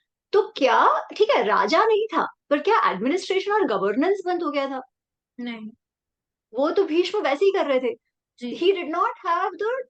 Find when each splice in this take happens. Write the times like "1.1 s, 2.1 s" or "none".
none